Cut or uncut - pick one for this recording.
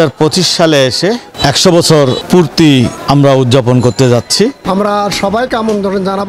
cut